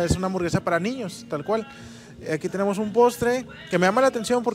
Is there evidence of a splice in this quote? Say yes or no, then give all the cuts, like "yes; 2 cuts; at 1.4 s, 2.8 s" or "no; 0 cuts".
no; 0 cuts